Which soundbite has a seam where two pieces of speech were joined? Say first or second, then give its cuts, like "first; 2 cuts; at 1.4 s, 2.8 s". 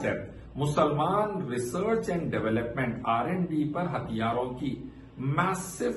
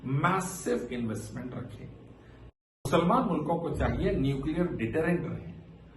second; 1 cut; at 2.3 s